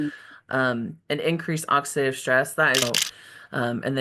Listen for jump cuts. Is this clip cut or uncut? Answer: cut